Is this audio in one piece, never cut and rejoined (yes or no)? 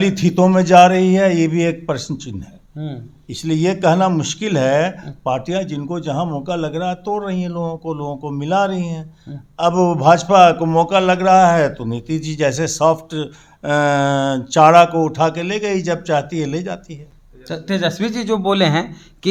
yes